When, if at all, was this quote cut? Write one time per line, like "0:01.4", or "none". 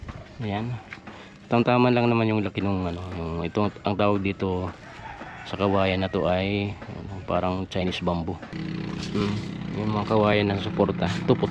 0:08.5

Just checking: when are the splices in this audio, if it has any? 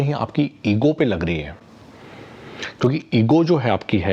none

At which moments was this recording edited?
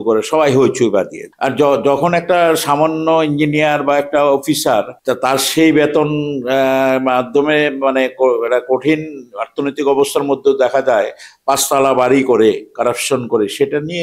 0:01.2
0:04.9

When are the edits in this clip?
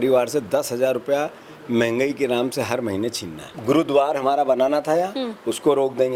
0:03.5

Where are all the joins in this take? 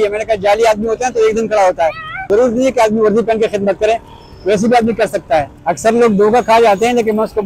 0:02.2
0:05.5

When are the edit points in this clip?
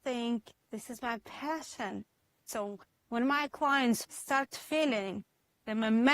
0:02.4
0:04.1

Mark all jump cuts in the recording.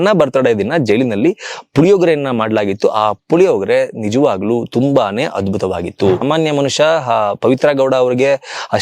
0:06.2

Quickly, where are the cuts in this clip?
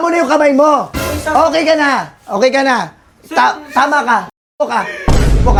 none

